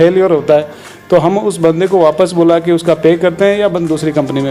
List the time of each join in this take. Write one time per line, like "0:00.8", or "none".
none